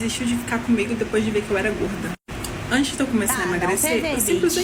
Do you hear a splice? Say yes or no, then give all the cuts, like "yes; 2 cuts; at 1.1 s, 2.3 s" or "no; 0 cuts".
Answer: no; 0 cuts